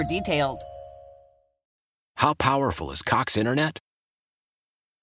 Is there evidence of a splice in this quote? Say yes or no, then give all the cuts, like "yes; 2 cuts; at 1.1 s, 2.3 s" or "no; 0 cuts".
yes; 1 cut; at 1.7 s